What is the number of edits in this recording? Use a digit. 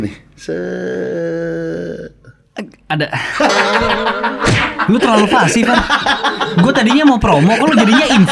0